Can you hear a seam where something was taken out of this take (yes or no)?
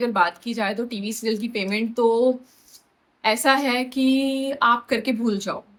no